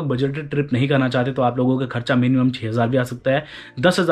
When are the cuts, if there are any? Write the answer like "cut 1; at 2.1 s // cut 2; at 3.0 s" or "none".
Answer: none